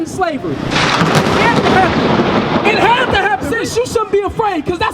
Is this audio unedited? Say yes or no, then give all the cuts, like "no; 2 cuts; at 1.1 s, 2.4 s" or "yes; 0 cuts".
no; 1 cut; at 3.5 s